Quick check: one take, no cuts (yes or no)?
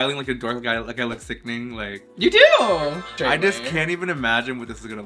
no